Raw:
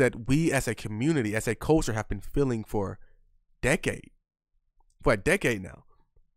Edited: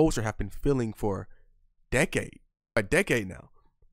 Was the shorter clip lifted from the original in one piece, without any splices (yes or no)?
no